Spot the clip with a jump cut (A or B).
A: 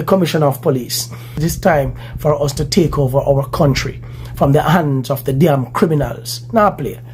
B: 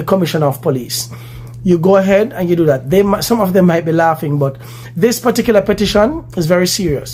A